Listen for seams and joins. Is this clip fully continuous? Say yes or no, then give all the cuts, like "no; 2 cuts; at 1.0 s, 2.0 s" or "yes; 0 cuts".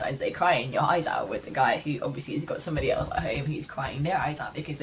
yes; 0 cuts